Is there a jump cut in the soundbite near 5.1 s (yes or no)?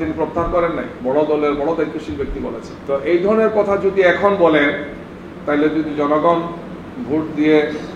no